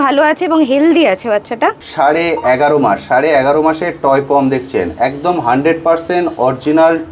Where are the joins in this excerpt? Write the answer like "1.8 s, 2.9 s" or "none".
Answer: 1.8 s